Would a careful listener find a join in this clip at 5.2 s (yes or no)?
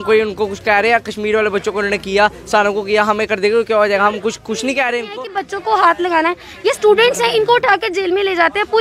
yes